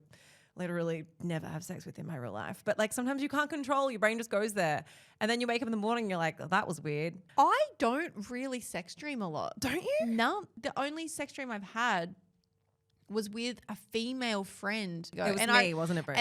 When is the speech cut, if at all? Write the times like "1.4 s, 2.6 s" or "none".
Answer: 7.2 s, 10.5 s, 15.1 s